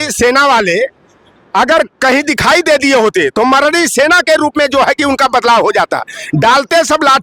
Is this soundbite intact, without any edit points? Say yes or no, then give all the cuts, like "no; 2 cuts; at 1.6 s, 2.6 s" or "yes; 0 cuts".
yes; 0 cuts